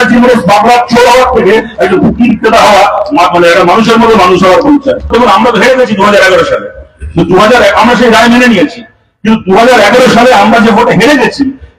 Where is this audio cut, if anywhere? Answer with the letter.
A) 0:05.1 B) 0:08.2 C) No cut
A